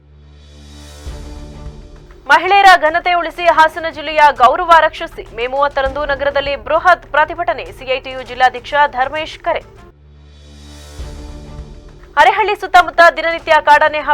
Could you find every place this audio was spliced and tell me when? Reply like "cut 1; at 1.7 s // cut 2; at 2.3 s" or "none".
none